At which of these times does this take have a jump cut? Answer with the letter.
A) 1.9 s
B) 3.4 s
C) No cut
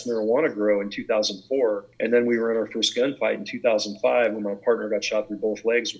A